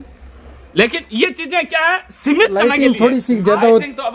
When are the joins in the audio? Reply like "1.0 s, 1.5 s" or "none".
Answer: 2.6 s